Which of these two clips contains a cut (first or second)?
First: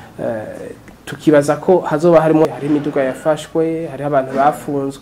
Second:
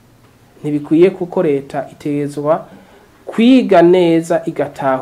first